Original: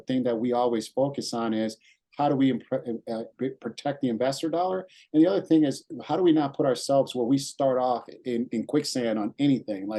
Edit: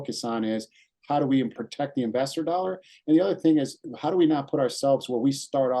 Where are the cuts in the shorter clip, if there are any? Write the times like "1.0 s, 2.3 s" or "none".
1.5 s